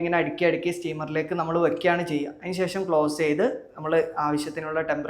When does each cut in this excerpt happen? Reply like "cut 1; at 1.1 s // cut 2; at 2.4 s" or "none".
none